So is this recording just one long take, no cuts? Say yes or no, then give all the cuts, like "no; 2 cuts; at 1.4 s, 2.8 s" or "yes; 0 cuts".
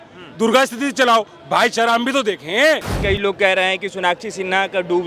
no; 1 cut; at 2.9 s